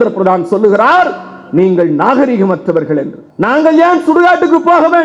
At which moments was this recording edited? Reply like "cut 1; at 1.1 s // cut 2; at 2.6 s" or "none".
cut 1; at 3.3 s